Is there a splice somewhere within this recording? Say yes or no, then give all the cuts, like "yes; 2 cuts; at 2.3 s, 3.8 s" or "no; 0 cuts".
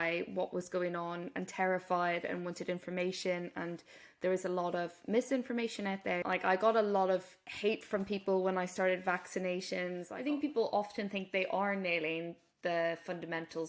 yes; 2 cuts; at 6.2 s, 10.1 s